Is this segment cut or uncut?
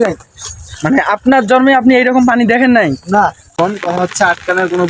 cut